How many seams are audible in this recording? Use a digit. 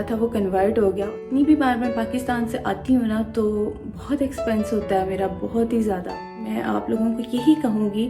2